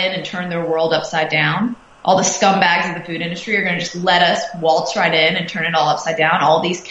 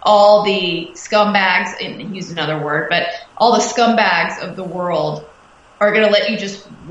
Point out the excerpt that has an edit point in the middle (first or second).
second